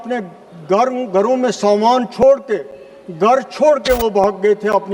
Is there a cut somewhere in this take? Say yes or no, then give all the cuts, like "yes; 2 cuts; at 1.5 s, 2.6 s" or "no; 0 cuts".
no; 0 cuts